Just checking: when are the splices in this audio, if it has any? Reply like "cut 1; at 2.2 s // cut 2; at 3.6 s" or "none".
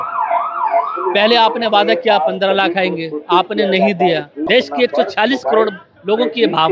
cut 1; at 4.4 s